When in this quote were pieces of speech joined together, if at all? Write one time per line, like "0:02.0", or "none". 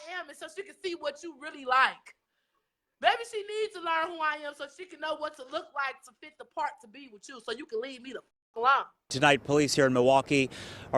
0:09.1